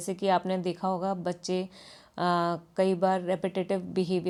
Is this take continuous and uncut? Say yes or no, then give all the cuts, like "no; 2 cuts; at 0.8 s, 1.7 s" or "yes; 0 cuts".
yes; 0 cuts